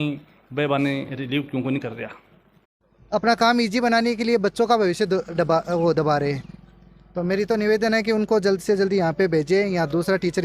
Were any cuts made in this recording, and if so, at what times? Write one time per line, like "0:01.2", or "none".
0:02.8